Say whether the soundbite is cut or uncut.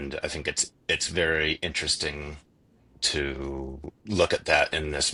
uncut